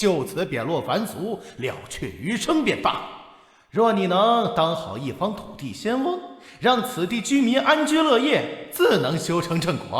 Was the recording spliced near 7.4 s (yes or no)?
no